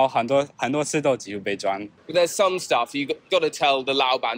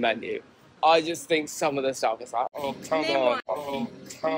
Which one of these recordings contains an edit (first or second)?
first